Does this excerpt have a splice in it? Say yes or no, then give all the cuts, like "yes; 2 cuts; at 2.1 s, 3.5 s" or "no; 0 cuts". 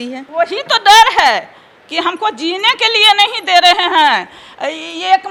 no; 0 cuts